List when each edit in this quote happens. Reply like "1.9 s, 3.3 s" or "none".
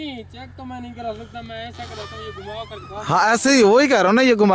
none